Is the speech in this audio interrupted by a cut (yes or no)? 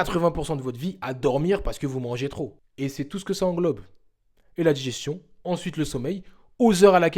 yes